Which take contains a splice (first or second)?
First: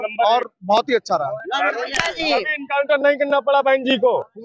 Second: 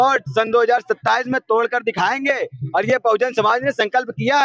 first